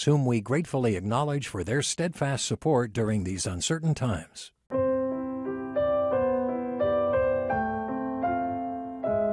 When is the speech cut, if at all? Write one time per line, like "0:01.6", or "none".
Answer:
0:04.6